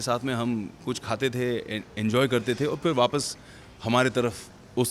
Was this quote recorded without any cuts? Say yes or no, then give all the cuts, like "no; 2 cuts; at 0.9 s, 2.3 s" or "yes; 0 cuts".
yes; 0 cuts